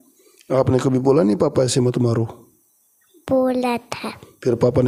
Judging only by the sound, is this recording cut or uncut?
uncut